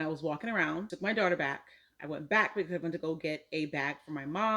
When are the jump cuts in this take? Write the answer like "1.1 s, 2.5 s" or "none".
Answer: 0.9 s